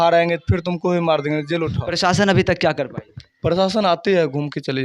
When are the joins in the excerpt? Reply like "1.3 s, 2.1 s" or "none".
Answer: 1.8 s